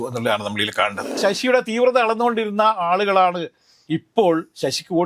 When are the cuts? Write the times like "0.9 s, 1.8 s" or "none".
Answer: 1.2 s